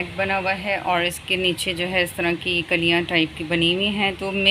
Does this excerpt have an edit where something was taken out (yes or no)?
no